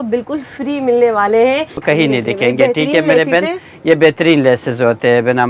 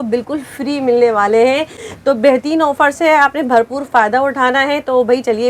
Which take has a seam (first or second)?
first